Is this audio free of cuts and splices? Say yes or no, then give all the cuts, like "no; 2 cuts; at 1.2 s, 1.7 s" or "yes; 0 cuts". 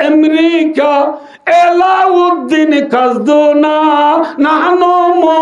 yes; 0 cuts